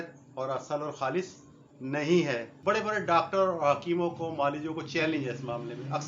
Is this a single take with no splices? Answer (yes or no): no